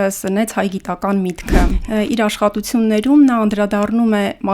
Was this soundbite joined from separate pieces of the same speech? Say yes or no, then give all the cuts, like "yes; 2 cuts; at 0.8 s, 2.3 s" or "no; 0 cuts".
yes; 1 cut; at 1.8 s